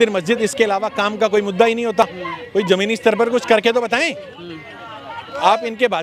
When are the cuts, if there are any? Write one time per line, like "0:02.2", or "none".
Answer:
none